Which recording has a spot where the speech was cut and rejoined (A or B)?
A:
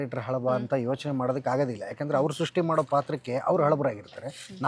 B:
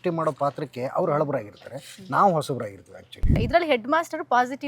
B